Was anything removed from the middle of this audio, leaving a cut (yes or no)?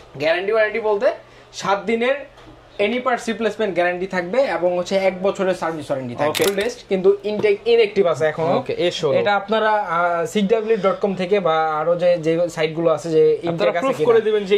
yes